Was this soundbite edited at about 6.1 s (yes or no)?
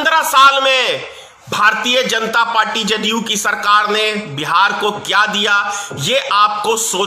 no